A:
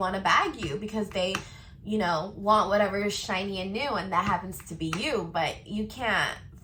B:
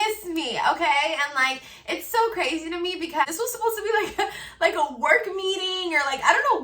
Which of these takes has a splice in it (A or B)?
B